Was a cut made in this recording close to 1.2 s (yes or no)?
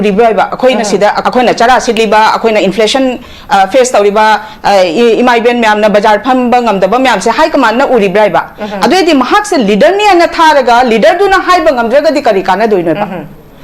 yes